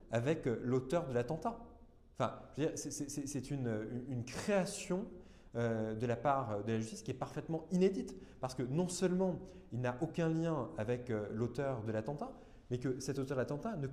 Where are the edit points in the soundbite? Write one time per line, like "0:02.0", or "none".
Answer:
none

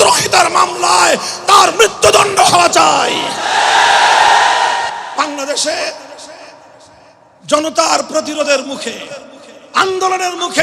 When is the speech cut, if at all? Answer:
0:05.0

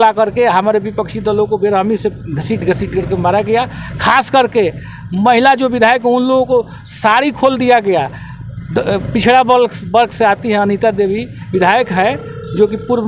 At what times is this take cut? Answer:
none

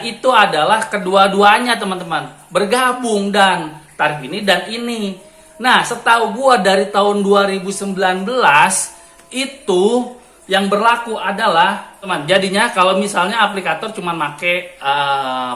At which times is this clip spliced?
0:12.1

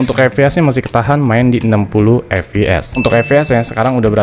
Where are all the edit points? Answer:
0:03.0

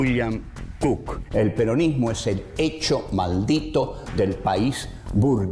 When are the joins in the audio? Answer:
0:03.9

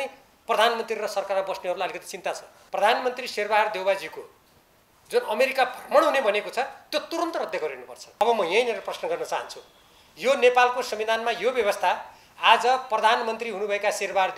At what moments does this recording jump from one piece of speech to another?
0:02.5
0:08.2

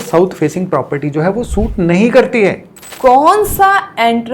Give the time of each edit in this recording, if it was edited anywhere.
0:02.9

